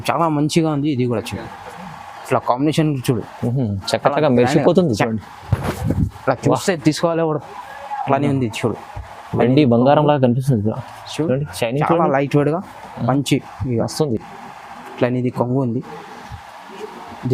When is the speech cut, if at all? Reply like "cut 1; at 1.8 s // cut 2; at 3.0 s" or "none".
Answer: none